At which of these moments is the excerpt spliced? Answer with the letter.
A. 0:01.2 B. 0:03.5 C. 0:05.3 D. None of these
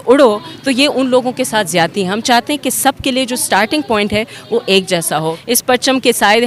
C